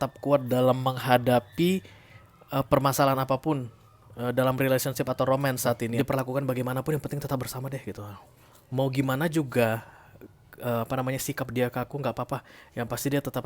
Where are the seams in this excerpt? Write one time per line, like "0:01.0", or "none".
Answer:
0:05.9